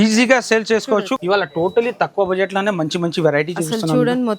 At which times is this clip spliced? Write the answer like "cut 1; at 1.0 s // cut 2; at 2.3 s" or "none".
cut 1; at 1.1 s